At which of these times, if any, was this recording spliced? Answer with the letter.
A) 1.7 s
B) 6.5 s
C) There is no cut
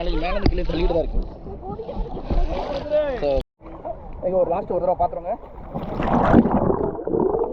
C